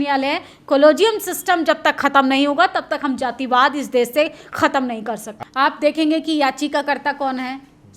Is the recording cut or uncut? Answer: cut